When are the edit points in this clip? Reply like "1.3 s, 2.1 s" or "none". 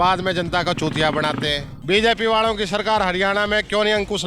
1.7 s